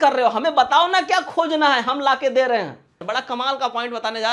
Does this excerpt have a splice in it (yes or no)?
yes